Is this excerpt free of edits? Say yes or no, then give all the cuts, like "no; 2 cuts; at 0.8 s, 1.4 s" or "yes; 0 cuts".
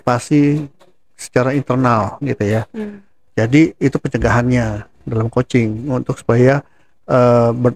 yes; 0 cuts